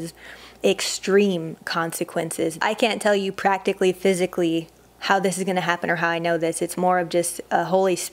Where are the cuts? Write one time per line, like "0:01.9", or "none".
0:02.6